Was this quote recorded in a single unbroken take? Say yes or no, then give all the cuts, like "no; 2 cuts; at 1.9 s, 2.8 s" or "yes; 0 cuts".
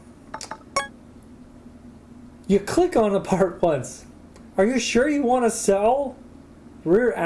yes; 0 cuts